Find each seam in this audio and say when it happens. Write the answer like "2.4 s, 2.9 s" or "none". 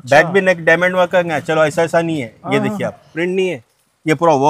3.2 s